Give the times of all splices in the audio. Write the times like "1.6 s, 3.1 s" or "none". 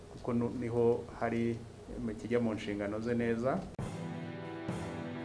3.8 s